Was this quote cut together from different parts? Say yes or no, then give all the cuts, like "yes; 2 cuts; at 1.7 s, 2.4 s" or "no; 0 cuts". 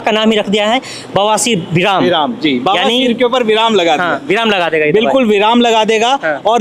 no; 0 cuts